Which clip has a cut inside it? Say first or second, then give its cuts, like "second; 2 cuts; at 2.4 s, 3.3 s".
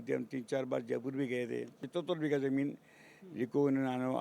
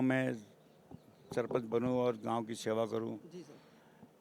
first; 1 cut; at 1.8 s